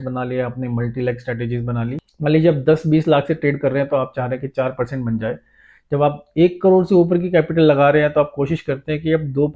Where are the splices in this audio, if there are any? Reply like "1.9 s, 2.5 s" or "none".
2.0 s